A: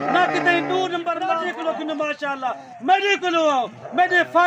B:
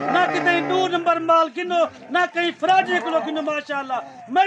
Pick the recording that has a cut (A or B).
A